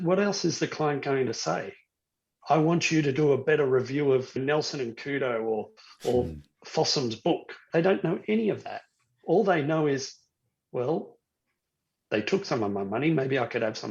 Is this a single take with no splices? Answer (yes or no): no